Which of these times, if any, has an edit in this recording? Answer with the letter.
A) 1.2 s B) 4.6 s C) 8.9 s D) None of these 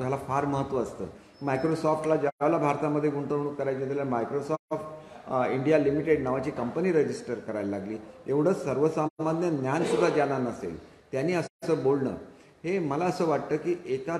A